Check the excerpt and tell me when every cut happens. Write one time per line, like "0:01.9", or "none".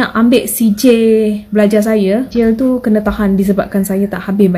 0:02.3